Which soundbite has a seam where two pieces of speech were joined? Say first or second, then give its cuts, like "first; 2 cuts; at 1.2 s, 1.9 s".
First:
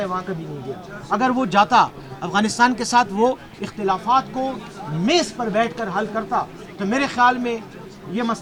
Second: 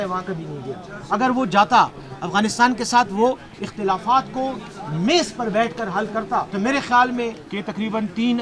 second; 2 cuts; at 6.5 s, 7.5 s